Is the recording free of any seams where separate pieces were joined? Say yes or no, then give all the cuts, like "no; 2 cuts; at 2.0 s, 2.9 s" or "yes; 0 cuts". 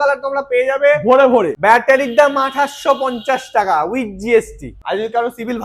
no; 2 cuts; at 1.5 s, 4.7 s